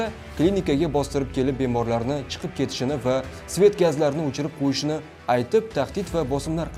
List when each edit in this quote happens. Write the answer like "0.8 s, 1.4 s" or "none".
none